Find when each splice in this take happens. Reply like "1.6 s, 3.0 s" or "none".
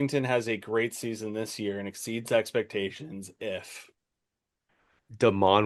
none